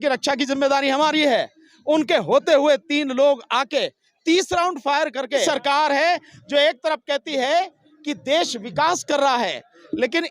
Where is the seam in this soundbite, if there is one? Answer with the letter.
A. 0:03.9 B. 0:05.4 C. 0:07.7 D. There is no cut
B